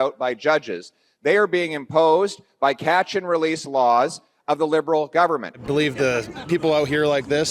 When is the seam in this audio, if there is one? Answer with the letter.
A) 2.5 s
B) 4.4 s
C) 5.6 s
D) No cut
C